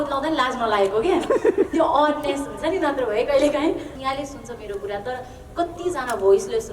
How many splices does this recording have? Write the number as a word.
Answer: one